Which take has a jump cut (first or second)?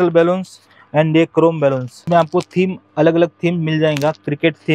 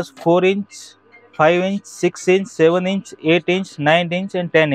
first